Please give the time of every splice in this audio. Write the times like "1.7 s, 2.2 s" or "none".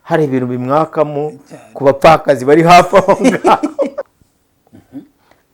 4.1 s